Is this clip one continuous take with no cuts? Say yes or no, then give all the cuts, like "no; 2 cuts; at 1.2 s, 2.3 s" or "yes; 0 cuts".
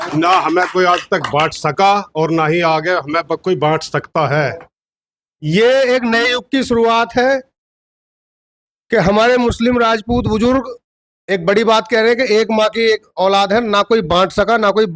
yes; 0 cuts